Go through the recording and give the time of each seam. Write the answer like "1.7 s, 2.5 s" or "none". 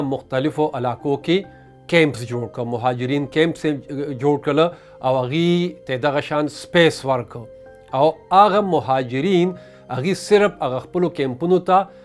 none